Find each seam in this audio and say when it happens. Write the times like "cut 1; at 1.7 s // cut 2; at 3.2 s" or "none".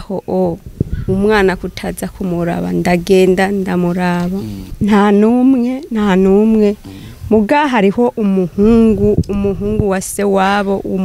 cut 1; at 4.6 s